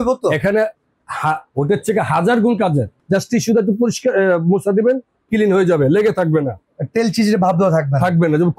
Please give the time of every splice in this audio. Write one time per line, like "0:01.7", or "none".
0:02.9

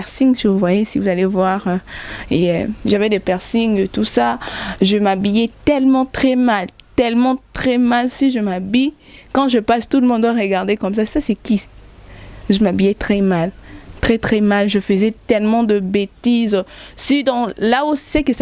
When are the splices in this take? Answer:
none

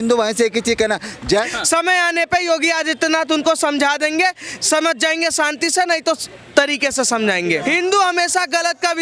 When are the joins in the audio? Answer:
0:01.2
0:07.6

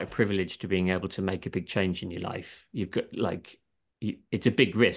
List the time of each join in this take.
none

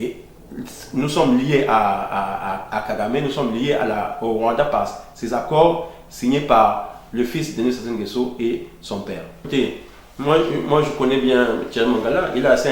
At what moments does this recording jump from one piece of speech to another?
0:09.4

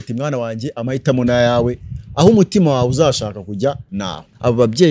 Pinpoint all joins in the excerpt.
0:03.9

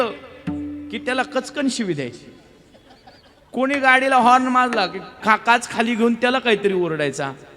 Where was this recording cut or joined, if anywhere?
0:05.1

